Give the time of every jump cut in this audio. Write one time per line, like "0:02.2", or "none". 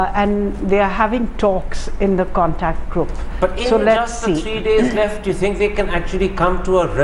0:02.7